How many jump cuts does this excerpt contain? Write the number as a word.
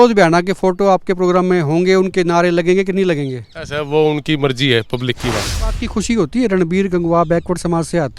one